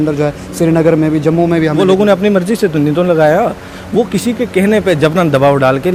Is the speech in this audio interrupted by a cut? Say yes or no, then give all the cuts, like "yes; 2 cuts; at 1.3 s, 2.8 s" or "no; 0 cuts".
no; 0 cuts